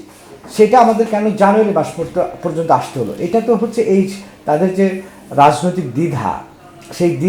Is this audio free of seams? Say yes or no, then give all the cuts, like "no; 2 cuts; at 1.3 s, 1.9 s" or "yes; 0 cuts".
yes; 0 cuts